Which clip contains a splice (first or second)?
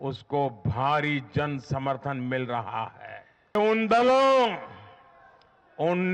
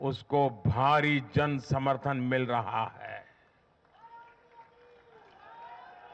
first